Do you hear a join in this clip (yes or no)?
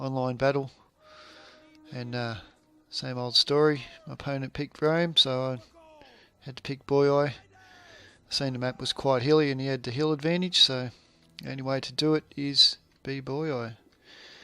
yes